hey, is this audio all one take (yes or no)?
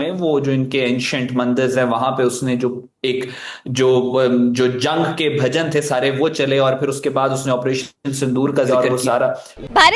yes